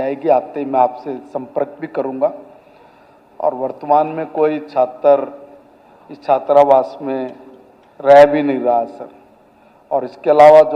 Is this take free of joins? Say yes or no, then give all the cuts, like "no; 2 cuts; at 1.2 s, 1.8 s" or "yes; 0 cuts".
yes; 0 cuts